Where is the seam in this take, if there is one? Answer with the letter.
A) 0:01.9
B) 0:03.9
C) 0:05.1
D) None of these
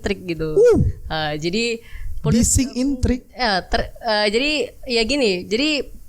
D